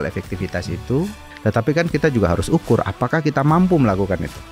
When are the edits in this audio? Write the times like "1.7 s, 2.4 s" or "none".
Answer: 1.2 s